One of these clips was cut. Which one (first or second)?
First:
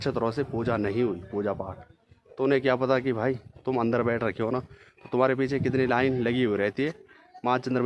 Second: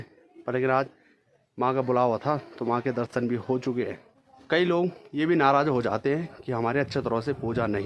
second